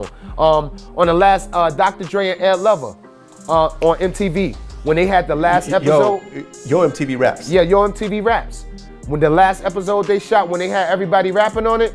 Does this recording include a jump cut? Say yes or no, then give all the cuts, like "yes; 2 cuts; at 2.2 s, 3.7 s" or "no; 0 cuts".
no; 0 cuts